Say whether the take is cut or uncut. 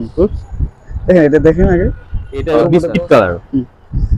cut